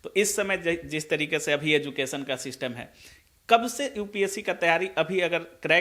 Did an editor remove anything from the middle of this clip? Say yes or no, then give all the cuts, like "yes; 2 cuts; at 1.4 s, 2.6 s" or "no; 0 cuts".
no; 0 cuts